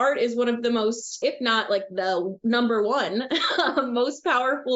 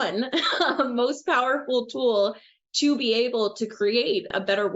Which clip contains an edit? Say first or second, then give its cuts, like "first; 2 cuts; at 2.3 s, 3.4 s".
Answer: first; 1 cut; at 1.2 s